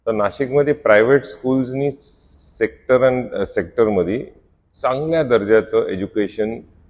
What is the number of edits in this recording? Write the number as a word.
zero